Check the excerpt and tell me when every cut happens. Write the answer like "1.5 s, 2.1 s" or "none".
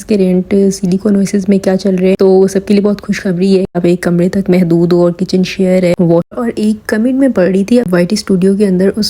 3.7 s, 6.3 s